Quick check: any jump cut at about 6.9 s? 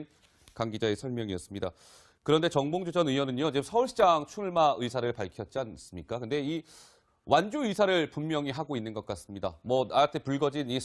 no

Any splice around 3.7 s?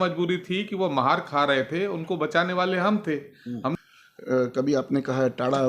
yes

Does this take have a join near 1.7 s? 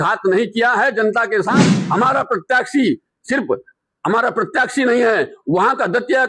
yes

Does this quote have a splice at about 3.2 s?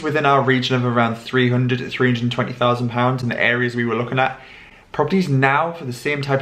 no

